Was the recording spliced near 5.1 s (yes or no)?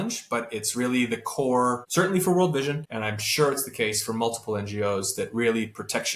no